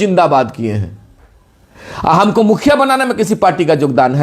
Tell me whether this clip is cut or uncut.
uncut